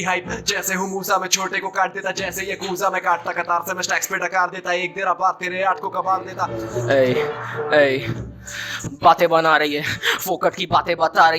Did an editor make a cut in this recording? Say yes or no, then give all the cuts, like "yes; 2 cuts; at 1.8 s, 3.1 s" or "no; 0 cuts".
yes; 1 cut; at 6.6 s